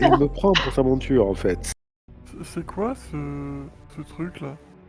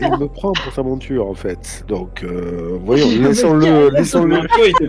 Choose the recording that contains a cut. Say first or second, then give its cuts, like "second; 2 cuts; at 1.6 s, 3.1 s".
first; 1 cut; at 1.7 s